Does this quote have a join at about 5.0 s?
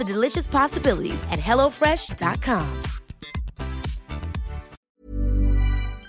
yes; 1 cut; at 5.0 s

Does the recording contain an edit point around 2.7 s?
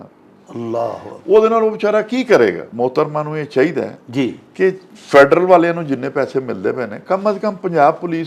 yes; 1 cut; at 2.7 s

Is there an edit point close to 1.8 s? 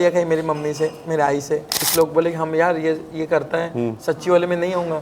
yes; 1 cut; at 1.8 s

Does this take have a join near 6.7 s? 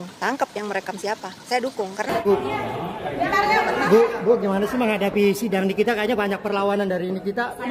no; 1 cut; at 2.1 s

